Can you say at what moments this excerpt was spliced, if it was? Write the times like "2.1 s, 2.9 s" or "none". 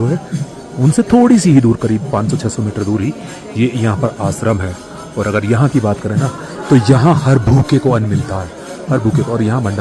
none